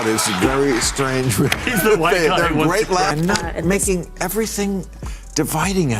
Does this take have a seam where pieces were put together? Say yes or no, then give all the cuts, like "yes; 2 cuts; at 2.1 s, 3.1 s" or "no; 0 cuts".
yes; 1 cut; at 3.1 s